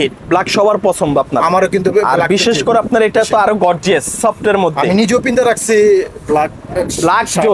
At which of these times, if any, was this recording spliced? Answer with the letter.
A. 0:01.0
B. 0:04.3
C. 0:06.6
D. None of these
D